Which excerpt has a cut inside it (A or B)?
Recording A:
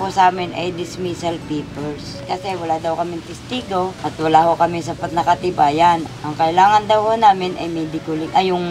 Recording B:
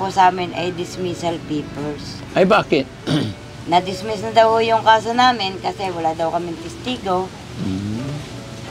A